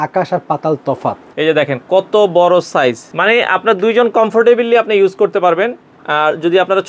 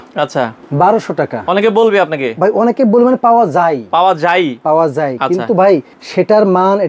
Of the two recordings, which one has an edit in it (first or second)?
first